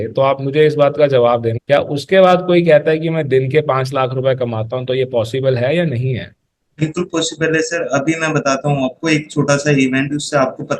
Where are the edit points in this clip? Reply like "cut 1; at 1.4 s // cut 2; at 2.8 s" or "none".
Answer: cut 1; at 1.5 s